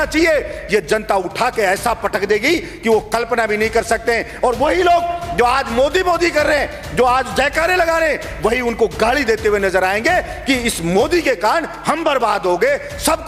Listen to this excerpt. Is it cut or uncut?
uncut